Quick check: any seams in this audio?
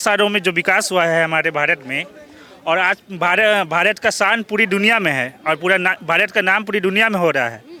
no; 0 cuts

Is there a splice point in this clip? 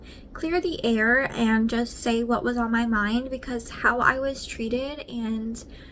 no; 0 cuts

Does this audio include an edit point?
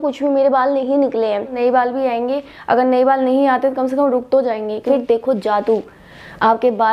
yes; 2 cuts; at 1.5 s, 4.8 s

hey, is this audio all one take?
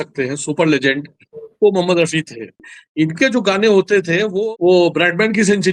no; 2 cuts; at 2.8 s, 4.3 s

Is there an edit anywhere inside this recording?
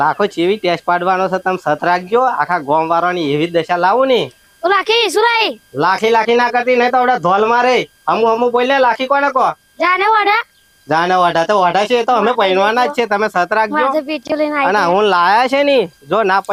no; 0 cuts

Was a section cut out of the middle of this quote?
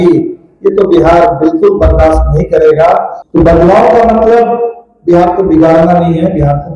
yes; 1 cut; at 3.2 s

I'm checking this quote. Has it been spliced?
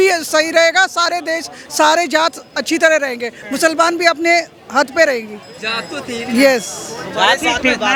no; 0 cuts

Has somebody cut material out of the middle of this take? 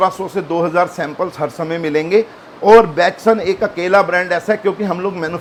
no; 0 cuts

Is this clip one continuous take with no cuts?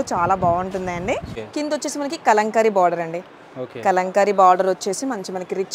no; 1 cut; at 1.4 s

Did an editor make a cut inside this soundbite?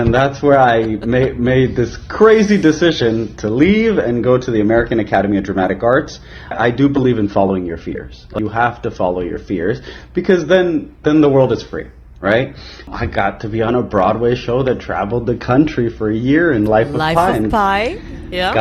yes; 3 cuts; at 6.5 s, 8.3 s, 12.9 s

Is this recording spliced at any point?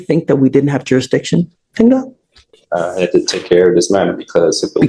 no; 0 cuts

